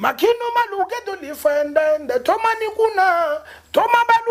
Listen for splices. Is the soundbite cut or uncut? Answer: uncut